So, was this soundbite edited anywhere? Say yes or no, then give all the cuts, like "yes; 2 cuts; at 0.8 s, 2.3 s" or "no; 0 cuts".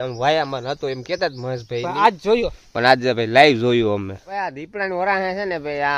yes; 1 cut; at 4.2 s